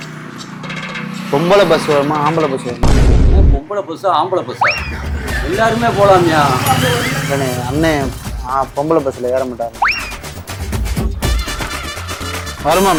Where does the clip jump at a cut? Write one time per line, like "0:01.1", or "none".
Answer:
none